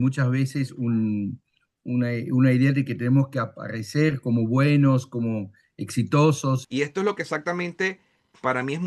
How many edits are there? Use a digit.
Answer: 1